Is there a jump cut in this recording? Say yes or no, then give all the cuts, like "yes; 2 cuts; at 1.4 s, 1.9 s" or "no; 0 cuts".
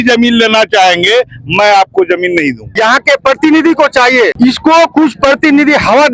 yes; 2 cuts; at 2.6 s, 4.3 s